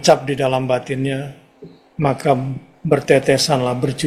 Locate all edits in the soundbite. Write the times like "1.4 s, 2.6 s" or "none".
none